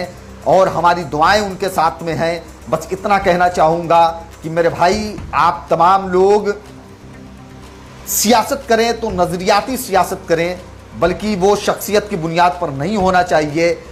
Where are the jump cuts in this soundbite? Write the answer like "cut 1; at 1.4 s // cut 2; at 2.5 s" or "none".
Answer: none